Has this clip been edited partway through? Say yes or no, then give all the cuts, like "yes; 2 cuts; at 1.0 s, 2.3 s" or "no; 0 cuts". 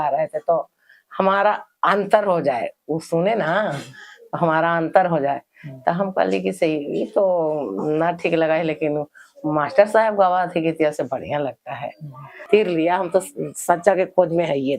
yes; 1 cut; at 12.4 s